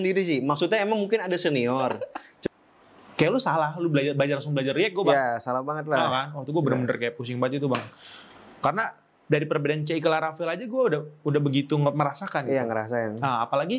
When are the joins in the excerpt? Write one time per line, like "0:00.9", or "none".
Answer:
0:02.2